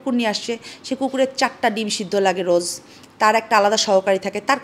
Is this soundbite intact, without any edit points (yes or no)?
yes